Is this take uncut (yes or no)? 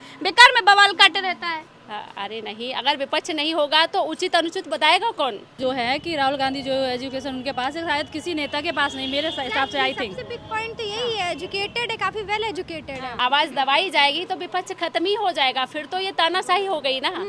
no